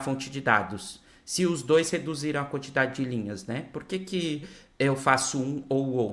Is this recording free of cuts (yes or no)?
yes